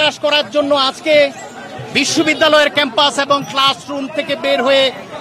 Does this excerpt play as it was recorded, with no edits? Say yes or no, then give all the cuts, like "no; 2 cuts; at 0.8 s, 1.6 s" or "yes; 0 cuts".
yes; 0 cuts